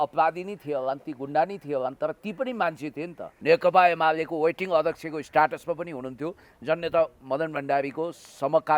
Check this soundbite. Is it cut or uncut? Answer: cut